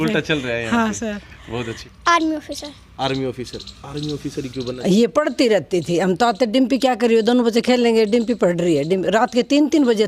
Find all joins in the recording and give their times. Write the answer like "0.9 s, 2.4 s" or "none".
1.8 s, 4.8 s